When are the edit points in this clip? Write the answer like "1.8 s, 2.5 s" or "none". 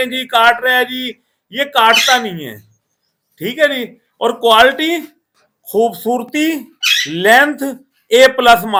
none